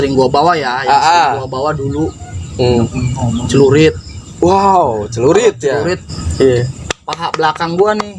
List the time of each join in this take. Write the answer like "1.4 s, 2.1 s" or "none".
6.1 s